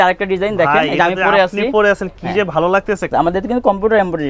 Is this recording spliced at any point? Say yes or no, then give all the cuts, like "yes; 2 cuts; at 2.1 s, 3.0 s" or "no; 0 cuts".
yes; 1 cut; at 3.1 s